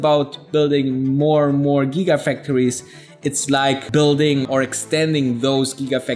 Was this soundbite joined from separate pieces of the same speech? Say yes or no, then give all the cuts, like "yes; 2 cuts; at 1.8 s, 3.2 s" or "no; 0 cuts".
no; 0 cuts